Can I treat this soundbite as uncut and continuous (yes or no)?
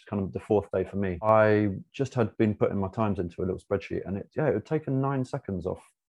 no